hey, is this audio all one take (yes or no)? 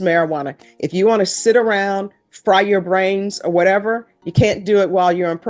yes